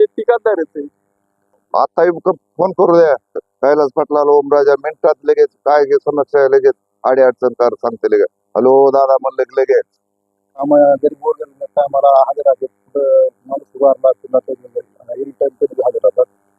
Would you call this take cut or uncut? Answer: cut